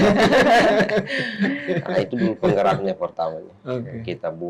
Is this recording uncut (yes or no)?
yes